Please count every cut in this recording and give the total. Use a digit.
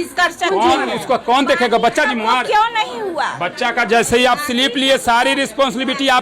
0